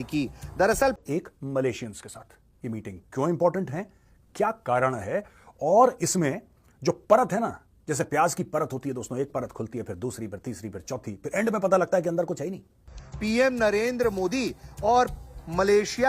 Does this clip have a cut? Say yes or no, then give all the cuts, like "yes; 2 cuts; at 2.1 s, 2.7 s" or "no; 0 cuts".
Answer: yes; 1 cut; at 12.8 s